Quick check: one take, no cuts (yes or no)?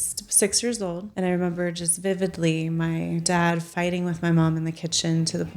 no